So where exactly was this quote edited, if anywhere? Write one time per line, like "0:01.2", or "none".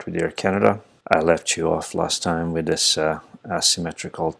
0:00.9